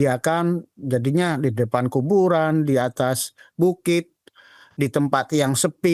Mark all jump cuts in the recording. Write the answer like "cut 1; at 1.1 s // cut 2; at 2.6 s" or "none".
none